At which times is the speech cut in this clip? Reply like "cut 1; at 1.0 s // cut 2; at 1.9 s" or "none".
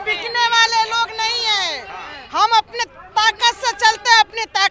none